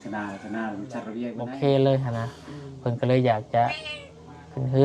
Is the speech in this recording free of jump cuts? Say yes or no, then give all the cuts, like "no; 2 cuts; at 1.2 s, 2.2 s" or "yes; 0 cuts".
no; 1 cut; at 1.3 s